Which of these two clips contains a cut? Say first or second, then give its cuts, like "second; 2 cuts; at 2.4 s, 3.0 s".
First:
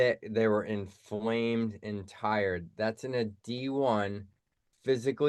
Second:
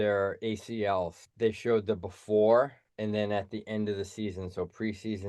second; 2 cuts; at 1.2 s, 2.8 s